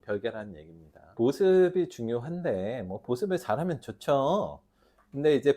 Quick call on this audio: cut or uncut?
cut